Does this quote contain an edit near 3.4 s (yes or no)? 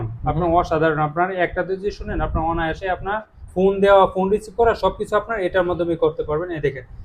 yes